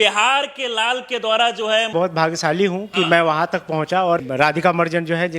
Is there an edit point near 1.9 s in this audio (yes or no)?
yes